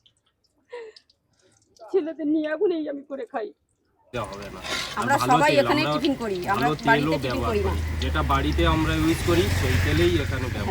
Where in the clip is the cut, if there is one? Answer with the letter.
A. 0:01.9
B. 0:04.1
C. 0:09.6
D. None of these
B